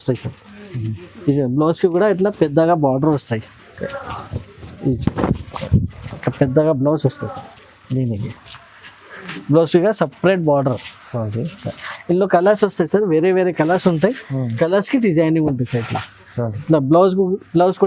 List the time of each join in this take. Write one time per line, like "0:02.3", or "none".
none